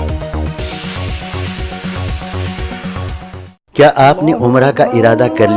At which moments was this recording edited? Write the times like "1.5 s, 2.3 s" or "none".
3.5 s